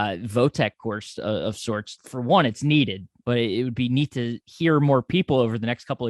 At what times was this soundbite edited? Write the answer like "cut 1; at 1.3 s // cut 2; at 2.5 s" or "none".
cut 1; at 1.9 s // cut 2; at 3.1 s